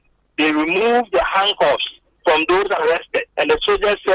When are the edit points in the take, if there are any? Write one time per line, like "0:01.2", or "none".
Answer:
0:03.2